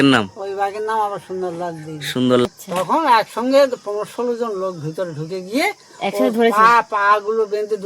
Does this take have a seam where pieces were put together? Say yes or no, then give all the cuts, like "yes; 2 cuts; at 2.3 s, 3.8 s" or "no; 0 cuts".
yes; 1 cut; at 2.5 s